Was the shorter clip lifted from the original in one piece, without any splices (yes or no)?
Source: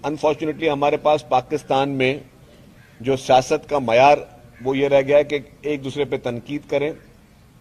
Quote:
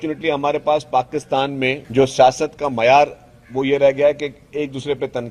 no